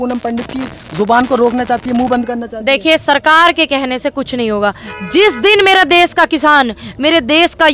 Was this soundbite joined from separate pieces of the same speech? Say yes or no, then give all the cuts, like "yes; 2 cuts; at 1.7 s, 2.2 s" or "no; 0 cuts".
no; 0 cuts